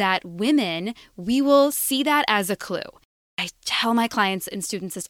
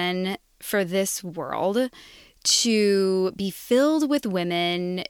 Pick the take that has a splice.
first; 1 cut; at 3.2 s

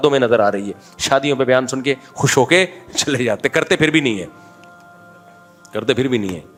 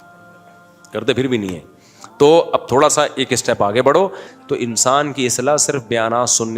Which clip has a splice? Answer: second; 1 cut; at 4.3 s

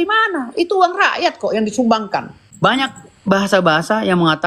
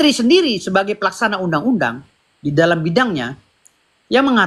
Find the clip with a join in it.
first; 1 cut; at 2.4 s

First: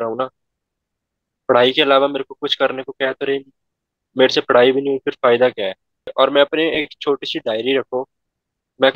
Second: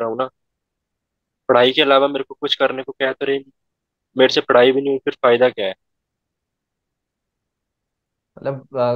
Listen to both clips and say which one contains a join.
first; 1 cut; at 6.1 s

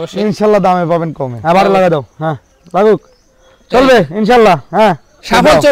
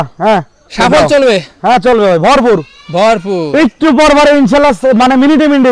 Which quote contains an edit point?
first; 1 cut; at 1.3 s

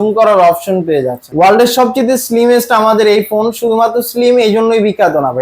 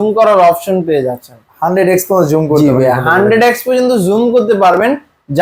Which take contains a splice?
first; 1 cut; at 1.3 s

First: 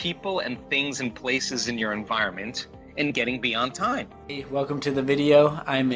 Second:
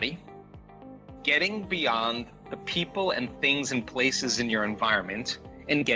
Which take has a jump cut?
first; 1 cut; at 4.4 s

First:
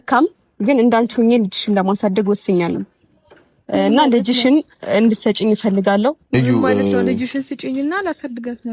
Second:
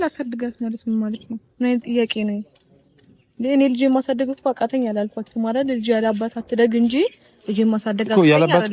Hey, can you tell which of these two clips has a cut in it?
first; 1 cut; at 6.3 s

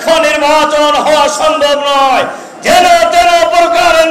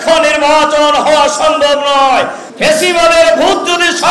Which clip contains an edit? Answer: second; 1 cut; at 2.4 s

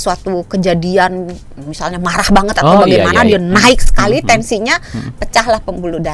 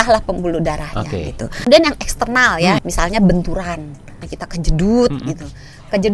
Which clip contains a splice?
second; 3 cuts; at 1.7 s, 2.8 s, 4.2 s

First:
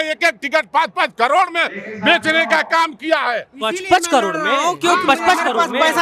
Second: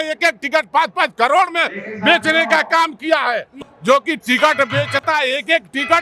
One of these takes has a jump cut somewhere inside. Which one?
second; 1 cut; at 3.6 s

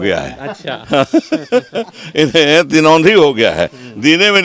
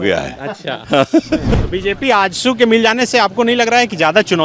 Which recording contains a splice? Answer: second; 1 cut; at 1.5 s

